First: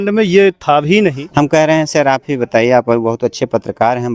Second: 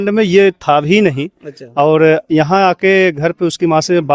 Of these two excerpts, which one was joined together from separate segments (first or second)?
first